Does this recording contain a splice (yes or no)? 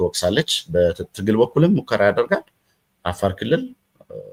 no